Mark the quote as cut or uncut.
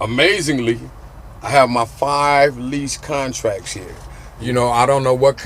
cut